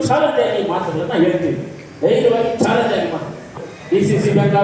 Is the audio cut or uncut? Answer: cut